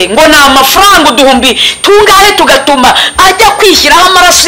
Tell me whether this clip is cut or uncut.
uncut